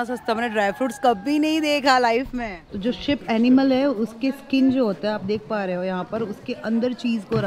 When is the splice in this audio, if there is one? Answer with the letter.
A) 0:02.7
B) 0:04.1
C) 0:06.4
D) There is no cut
A